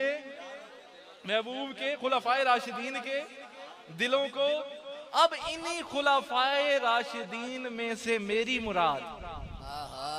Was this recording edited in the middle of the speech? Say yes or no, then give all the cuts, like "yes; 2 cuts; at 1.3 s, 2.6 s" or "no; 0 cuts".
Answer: no; 0 cuts